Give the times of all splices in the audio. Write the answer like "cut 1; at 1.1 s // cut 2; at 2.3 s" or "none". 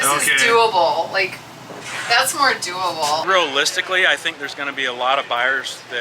cut 1; at 3.2 s